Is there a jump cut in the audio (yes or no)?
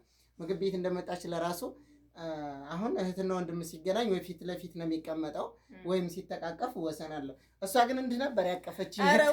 no